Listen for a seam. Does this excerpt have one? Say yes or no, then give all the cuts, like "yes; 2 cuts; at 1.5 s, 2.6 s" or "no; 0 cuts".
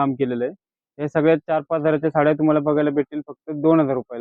no; 0 cuts